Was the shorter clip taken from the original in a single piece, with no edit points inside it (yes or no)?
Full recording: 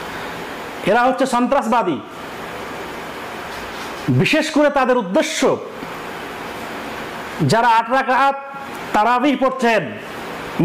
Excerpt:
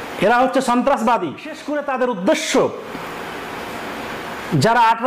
no